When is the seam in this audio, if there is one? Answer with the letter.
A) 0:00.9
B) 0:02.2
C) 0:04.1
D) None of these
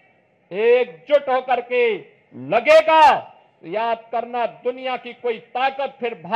D